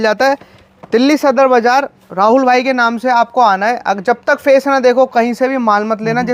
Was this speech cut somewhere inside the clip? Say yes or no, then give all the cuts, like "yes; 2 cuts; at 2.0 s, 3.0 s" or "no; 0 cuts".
no; 0 cuts